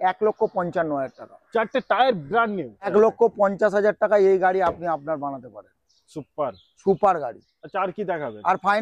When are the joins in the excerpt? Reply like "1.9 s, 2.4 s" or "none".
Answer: 2.9 s